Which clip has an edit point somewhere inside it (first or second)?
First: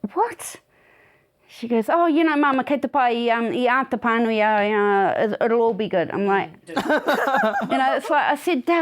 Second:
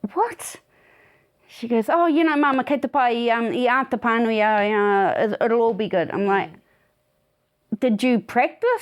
first